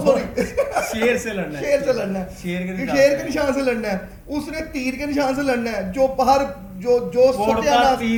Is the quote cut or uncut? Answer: uncut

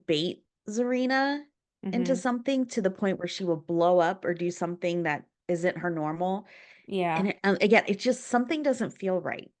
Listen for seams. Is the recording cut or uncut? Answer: uncut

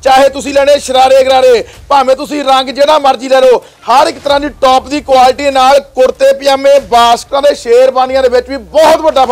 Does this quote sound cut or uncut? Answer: uncut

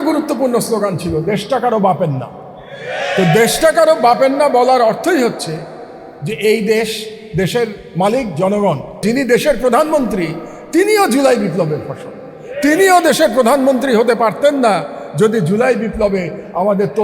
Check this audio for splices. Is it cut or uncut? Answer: cut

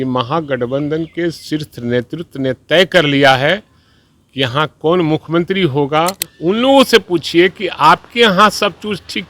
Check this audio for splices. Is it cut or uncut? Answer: cut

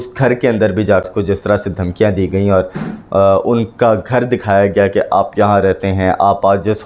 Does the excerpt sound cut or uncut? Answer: cut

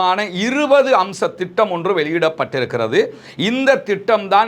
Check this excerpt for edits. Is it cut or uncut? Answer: uncut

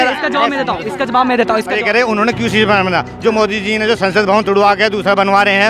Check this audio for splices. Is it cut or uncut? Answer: cut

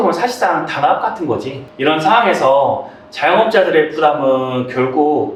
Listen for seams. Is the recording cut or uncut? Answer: uncut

